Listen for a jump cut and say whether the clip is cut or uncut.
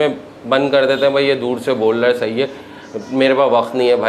uncut